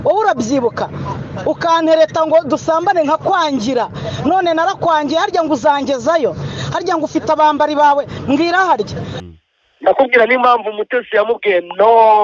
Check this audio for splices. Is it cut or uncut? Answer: cut